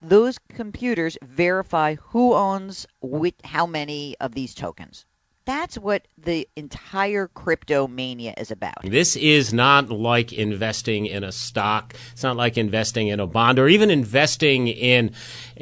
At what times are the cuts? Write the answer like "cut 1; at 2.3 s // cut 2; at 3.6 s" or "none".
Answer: cut 1; at 8.8 s